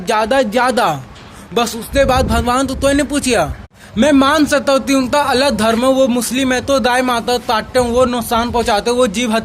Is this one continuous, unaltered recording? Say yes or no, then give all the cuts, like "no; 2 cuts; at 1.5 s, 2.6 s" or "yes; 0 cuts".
no; 1 cut; at 3.7 s